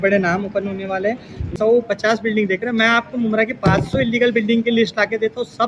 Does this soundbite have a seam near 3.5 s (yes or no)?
no